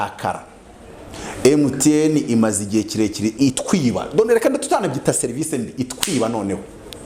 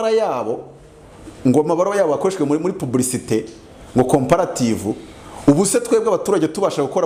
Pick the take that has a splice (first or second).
first